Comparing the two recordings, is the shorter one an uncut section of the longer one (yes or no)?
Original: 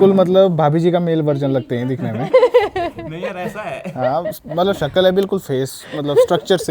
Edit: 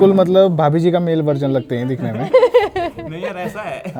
yes